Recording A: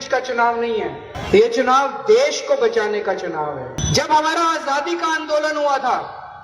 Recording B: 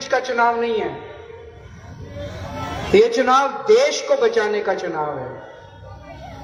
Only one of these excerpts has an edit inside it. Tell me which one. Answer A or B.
A